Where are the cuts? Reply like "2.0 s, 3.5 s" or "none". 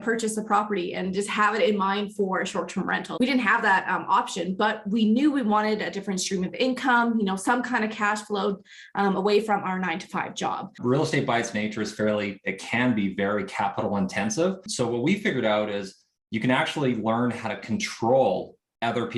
3.1 s, 10.8 s, 14.7 s